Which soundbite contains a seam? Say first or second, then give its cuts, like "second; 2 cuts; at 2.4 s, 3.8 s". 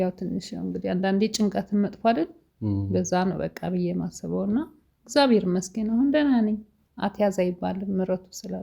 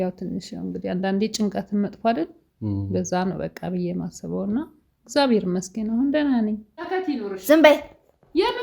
second; 1 cut; at 6.8 s